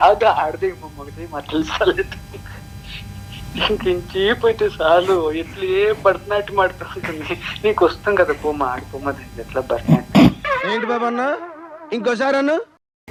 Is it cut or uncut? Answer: uncut